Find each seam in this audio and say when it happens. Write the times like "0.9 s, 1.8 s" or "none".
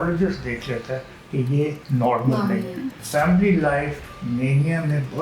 1.8 s, 2.9 s